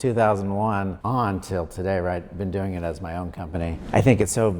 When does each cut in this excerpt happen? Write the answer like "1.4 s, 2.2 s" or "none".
1.0 s, 3.7 s